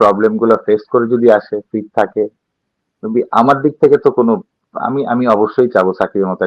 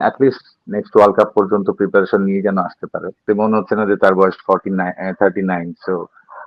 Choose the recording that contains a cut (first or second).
second